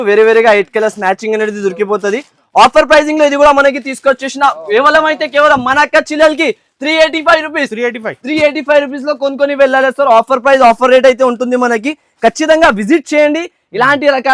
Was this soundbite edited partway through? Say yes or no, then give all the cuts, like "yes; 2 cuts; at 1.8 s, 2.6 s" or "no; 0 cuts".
no; 0 cuts